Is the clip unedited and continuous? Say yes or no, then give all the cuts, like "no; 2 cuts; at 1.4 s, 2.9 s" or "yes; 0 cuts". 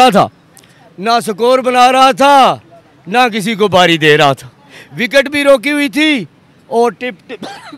yes; 0 cuts